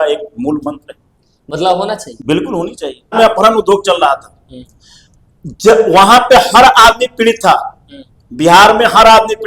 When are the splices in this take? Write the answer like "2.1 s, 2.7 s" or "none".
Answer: 3.1 s

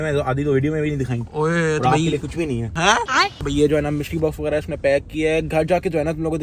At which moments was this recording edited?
none

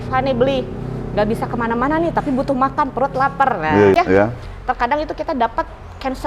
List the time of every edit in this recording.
4.0 s

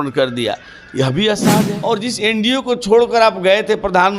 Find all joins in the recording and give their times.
1.7 s

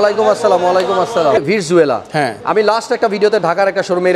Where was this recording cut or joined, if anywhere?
1.4 s

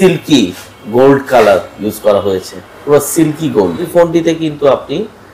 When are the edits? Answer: 3.9 s

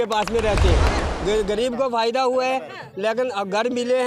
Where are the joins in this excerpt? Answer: 1.0 s

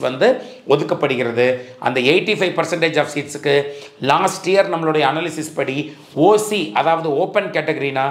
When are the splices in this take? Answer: none

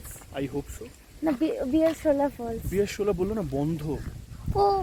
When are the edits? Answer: none

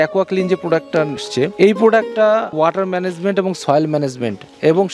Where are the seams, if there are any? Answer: 1.2 s, 2.5 s

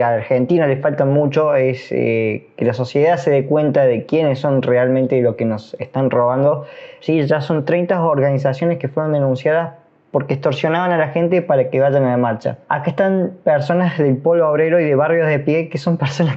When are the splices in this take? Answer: 6.9 s, 12.6 s

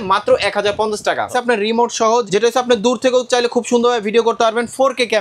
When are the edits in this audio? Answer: 1.3 s, 2.3 s

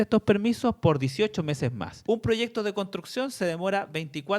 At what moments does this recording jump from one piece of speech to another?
1.9 s

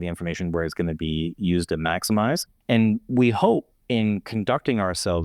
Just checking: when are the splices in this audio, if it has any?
2.5 s, 3.7 s

